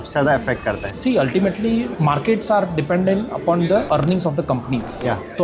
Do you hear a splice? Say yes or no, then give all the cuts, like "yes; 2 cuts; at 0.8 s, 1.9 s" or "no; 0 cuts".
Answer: yes; 2 cuts; at 0.9 s, 3.9 s